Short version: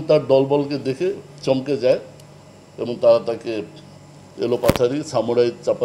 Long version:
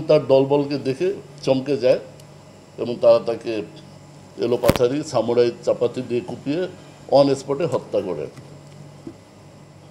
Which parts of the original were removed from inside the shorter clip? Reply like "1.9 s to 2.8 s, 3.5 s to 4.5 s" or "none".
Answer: none